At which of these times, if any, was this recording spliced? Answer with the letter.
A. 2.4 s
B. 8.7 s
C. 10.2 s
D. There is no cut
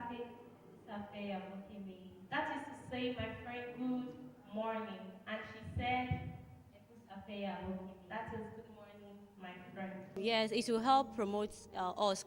C